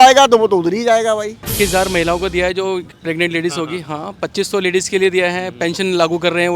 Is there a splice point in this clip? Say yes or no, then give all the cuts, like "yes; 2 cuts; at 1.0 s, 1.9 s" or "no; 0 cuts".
yes; 1 cut; at 1.4 s